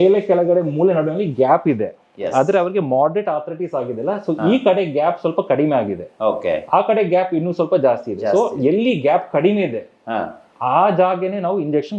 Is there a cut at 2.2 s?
no; 0 cuts

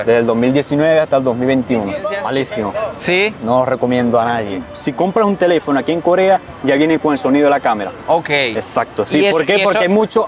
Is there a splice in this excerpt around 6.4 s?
no; 2 cuts; at 2.2 s, 4.8 s

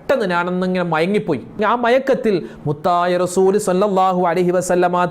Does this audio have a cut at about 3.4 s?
no; 1 cut; at 1.6 s

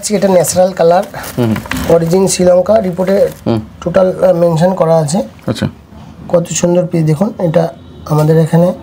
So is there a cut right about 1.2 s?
no; 0 cuts

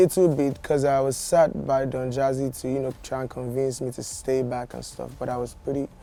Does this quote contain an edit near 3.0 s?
no; 0 cuts

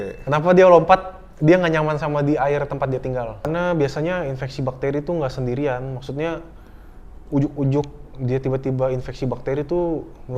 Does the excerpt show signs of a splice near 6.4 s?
no; 1 cut; at 3.5 s

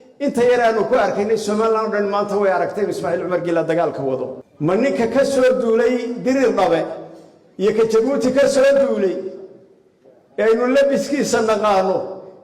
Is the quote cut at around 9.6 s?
no; 1 cut; at 4.4 s

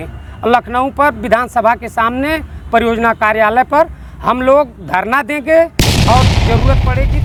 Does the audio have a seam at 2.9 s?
no; 0 cuts

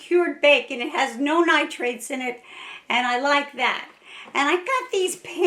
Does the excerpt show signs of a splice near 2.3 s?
no; 0 cuts

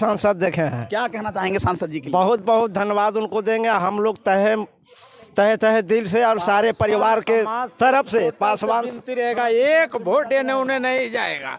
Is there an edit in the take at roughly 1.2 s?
no; 0 cuts

